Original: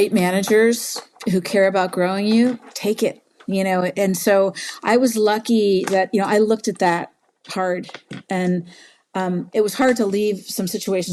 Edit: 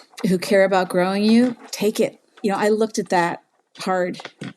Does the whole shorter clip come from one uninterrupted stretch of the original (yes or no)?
no